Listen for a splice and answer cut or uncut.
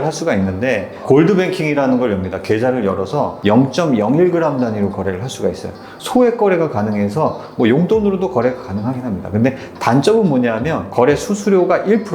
cut